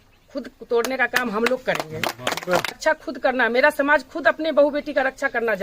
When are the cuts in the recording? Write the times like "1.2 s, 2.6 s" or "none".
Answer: 2.8 s

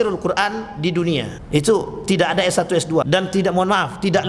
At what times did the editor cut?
1.4 s, 3.1 s

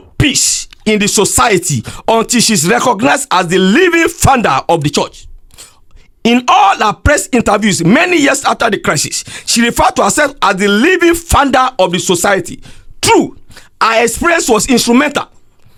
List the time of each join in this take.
none

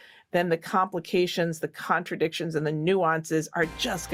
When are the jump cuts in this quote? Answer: none

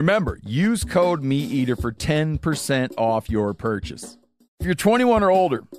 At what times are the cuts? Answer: 4.6 s

